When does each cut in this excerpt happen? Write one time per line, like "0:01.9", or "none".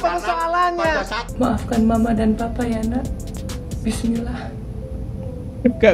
0:01.2